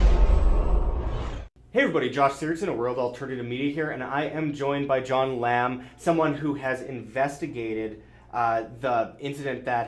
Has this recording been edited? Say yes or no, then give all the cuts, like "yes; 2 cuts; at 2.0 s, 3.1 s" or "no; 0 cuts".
yes; 1 cut; at 1.5 s